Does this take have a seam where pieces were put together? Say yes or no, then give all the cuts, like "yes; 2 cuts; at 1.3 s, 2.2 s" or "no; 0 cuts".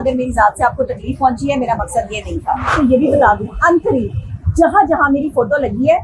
yes; 1 cut; at 2.7 s